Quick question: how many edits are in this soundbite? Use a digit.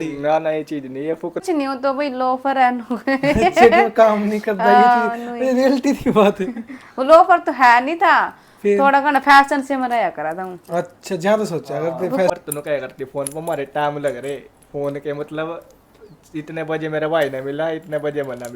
2